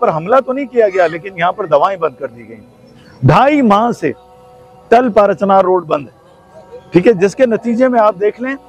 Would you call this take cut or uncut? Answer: uncut